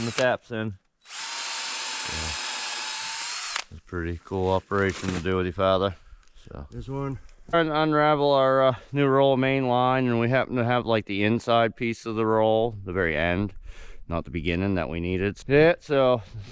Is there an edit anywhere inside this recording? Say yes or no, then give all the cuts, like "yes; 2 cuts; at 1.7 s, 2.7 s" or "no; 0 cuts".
no; 0 cuts